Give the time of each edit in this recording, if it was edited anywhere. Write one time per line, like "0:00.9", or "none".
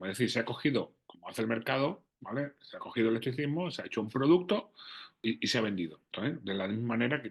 0:05.2
0:06.1